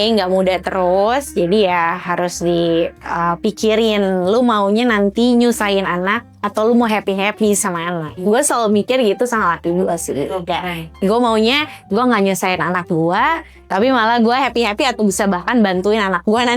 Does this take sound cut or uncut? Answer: uncut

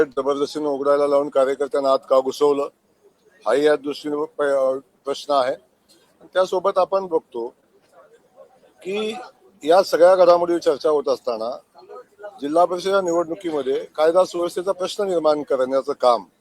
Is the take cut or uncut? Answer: uncut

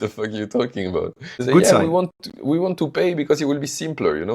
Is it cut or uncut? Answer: cut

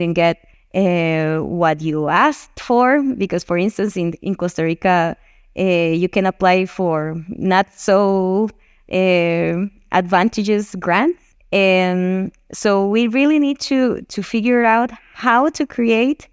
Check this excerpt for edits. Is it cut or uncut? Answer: uncut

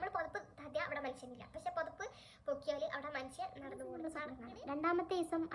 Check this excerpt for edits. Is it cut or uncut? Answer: cut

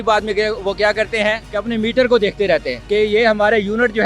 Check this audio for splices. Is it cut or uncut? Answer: cut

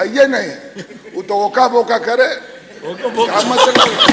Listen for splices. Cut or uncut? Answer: uncut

